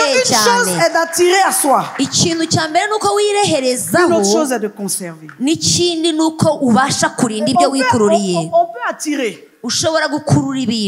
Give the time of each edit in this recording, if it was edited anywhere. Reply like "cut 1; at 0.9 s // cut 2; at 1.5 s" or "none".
none

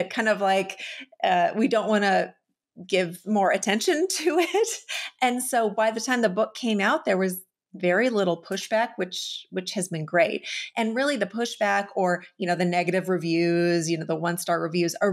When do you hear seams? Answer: none

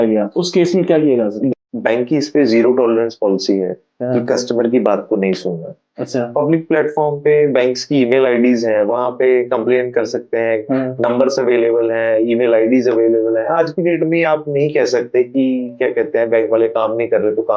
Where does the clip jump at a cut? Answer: cut 1; at 1.5 s

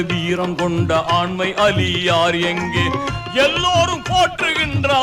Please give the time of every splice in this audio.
none

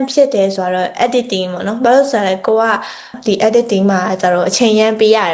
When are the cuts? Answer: cut 1; at 3.1 s

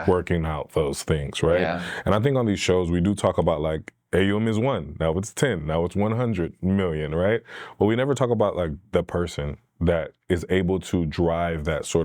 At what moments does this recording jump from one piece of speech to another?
none

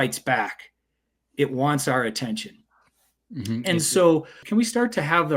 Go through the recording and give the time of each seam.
cut 1; at 4.4 s

